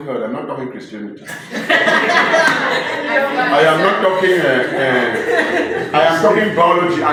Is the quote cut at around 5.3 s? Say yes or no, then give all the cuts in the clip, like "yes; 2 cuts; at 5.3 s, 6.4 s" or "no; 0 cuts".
no; 0 cuts